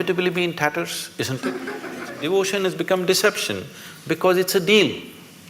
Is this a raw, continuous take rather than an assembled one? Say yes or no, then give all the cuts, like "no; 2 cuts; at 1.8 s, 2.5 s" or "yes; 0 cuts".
no; 1 cut; at 2.1 s